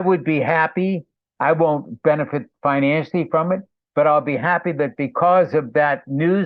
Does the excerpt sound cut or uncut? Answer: uncut